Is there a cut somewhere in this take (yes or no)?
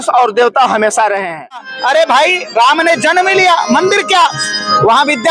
yes